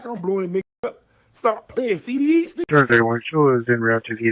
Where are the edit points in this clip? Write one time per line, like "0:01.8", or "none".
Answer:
0:02.6